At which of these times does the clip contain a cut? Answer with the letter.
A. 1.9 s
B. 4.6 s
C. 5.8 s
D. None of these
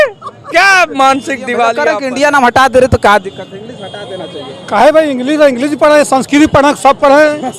A